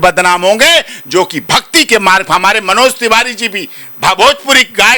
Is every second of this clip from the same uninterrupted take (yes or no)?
yes